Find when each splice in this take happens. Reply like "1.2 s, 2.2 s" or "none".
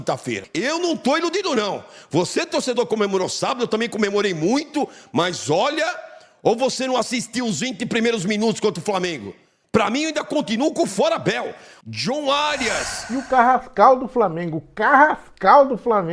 13.1 s